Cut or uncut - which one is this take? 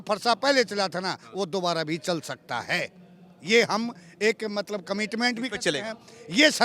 uncut